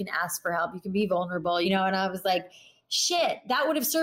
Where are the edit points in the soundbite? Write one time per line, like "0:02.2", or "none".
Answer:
0:01.7